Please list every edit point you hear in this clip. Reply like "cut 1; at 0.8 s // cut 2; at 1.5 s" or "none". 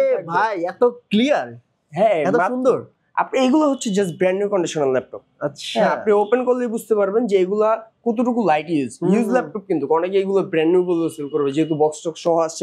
none